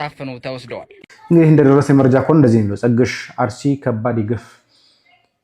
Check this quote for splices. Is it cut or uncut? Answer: cut